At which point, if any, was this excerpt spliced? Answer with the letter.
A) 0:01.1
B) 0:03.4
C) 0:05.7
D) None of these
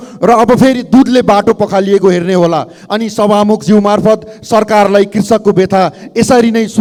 D